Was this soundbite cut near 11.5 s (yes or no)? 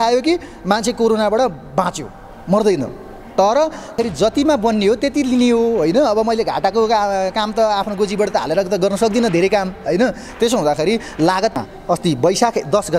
yes